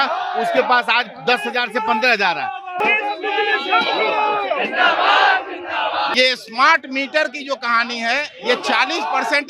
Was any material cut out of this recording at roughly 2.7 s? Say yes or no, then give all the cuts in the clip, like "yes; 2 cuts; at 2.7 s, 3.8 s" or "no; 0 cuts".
yes; 2 cuts; at 2.7 s, 6.1 s